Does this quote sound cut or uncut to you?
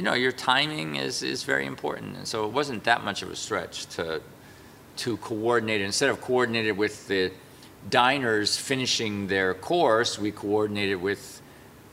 uncut